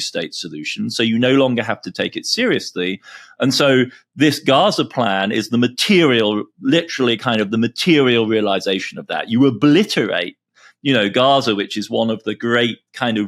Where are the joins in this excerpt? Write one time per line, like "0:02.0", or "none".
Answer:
none